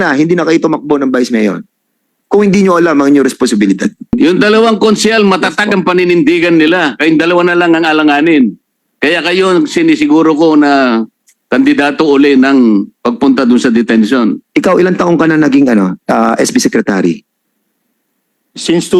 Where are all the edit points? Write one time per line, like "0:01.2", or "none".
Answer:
0:04.2
0:14.4